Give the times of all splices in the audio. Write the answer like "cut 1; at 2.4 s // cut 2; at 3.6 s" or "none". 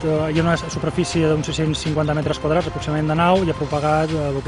cut 1; at 3.4 s